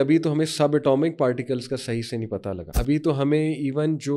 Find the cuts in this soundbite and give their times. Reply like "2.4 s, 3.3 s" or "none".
2.7 s